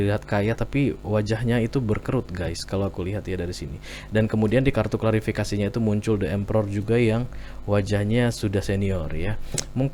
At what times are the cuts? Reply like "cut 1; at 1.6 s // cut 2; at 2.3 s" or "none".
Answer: none